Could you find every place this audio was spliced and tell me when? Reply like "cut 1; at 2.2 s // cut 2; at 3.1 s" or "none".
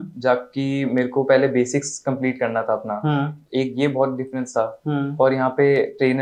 none